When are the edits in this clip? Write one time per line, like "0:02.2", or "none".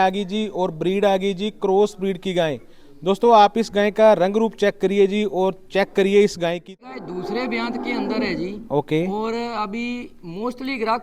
0:06.8